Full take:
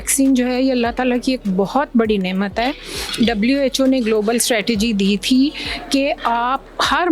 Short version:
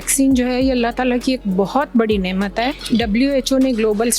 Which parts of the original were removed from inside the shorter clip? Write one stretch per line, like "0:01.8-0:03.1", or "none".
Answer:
0:02.8-0:03.1

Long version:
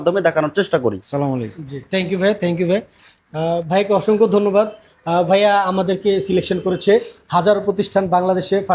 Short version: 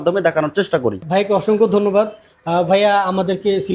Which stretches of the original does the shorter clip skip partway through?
0:01.0-0:03.6

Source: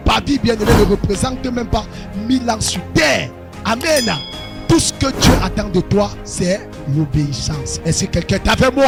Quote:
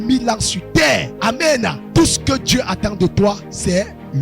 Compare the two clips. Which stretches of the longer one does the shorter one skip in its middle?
0:03.6-0:04.2

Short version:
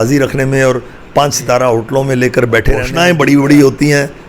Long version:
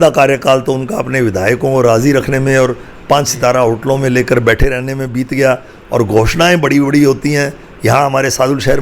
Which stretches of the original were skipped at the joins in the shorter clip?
0:04.8-0:06.3

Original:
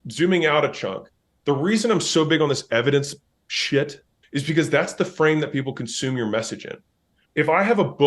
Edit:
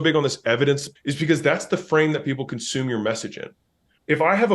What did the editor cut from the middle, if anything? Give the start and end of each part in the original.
0:03.2-0:04.2

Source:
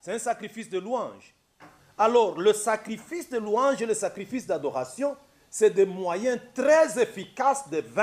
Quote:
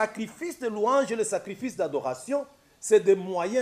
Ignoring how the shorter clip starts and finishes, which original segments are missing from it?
none

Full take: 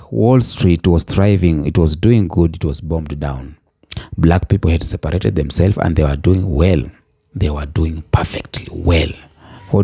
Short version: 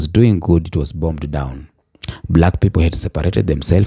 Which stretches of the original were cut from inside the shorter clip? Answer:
none

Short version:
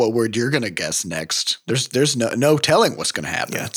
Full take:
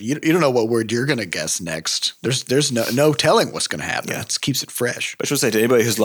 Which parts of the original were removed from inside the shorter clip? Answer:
none

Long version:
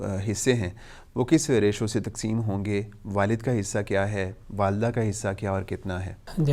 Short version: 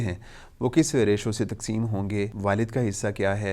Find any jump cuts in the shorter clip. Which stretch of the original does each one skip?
0:02.9-0:03.1

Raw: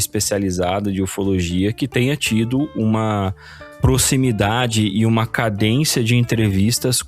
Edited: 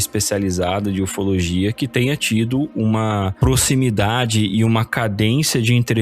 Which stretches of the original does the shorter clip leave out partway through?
0:03.3-0:03.7

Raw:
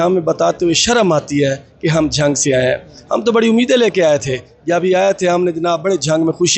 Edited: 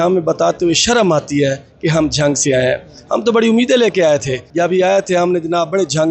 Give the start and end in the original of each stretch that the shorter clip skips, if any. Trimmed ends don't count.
0:04.4-0:04.5

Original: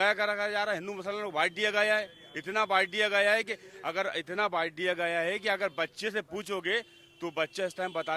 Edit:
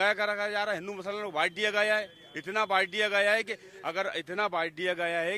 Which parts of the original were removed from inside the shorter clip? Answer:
none

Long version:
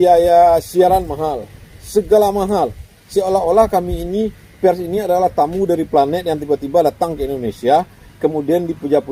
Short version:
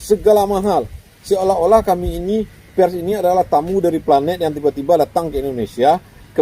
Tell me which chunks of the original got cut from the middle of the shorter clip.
none

